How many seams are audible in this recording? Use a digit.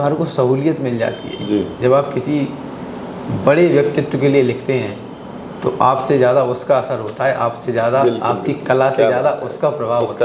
0